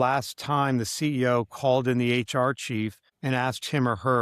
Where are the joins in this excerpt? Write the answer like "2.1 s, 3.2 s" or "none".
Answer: 3.1 s